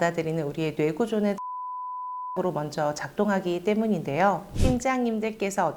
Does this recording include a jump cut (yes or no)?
yes